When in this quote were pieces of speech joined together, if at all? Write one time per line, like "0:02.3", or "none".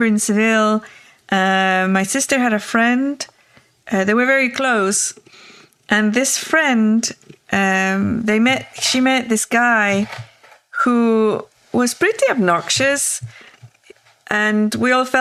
none